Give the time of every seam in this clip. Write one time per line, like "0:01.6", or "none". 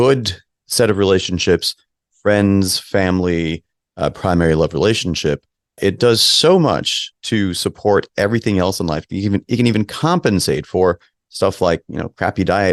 none